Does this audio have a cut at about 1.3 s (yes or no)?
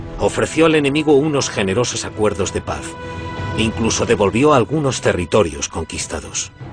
yes